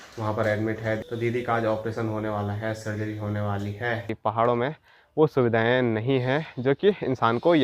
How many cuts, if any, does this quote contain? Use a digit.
2